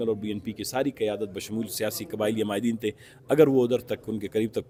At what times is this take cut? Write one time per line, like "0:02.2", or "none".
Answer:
none